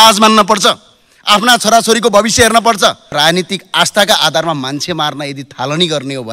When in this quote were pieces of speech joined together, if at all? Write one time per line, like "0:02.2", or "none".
0:03.1